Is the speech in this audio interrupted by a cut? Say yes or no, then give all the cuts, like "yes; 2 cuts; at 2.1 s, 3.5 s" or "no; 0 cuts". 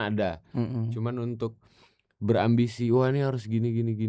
no; 0 cuts